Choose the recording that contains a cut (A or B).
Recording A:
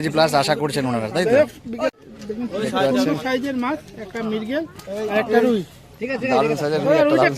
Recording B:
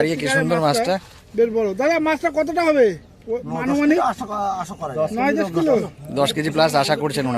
A